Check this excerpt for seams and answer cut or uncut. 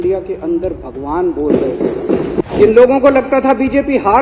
cut